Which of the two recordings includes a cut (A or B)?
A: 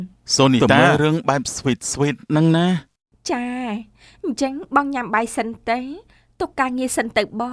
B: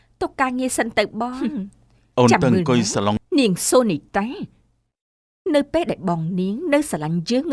B